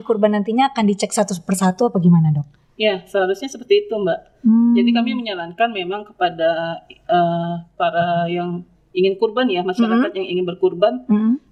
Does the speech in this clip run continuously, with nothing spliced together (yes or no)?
yes